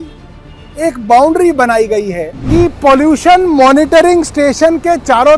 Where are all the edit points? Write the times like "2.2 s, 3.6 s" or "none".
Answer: 2.4 s